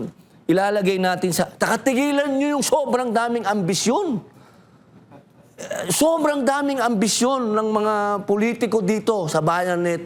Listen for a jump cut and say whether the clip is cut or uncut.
uncut